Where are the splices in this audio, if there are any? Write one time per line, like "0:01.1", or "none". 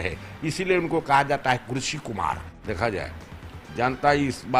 0:02.5